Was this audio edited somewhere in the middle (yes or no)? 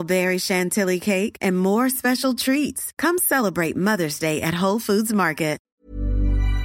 yes